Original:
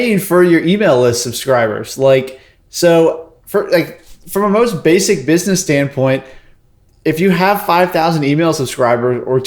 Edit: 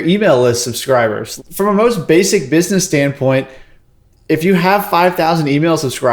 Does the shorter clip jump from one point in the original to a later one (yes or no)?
yes